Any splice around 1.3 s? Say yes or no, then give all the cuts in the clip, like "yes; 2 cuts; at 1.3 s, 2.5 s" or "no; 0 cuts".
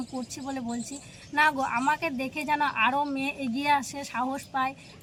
no; 0 cuts